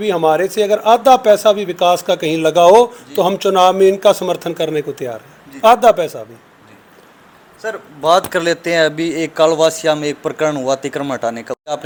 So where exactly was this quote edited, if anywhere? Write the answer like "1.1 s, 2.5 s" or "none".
none